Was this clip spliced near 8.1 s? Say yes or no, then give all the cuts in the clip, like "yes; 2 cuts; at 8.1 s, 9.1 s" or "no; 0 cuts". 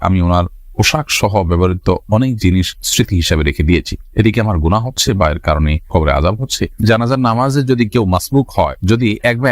no; 1 cut; at 6.8 s